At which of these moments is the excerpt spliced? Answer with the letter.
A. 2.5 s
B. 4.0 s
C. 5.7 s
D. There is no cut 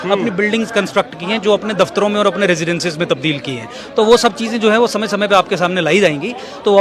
D